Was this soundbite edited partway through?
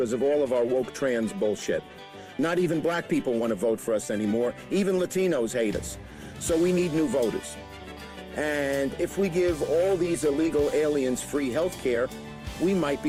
no; 0 cuts

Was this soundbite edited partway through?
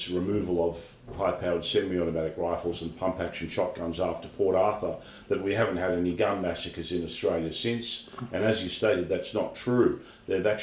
no; 0 cuts

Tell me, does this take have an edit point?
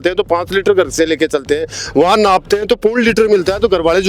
no; 0 cuts

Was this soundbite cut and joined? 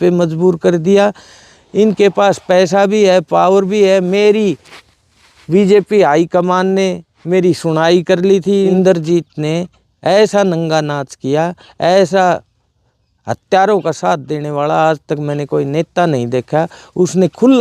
yes; 1 cut; at 8.7 s

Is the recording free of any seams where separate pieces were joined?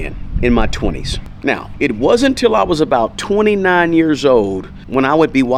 yes; 0 cuts

